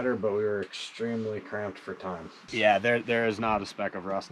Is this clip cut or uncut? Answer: cut